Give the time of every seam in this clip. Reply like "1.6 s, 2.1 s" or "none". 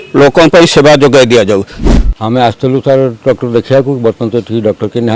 1.8 s